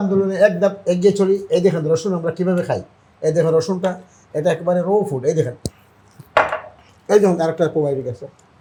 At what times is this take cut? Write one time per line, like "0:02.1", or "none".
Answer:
none